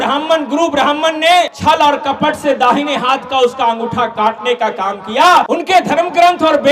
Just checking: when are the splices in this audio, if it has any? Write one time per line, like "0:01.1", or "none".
0:01.5
0:05.5